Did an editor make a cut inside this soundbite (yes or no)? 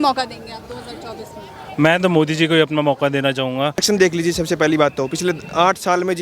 yes